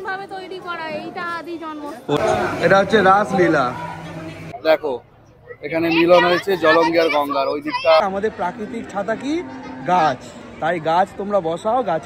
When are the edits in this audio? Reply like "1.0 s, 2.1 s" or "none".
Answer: 2.2 s, 4.5 s, 8.0 s